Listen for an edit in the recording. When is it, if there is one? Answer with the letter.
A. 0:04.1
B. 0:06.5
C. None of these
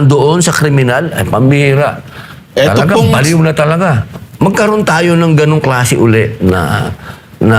A